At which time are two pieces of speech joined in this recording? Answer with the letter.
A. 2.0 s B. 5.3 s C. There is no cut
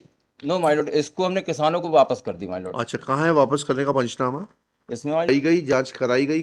B